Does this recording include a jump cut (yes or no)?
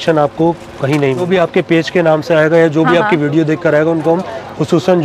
yes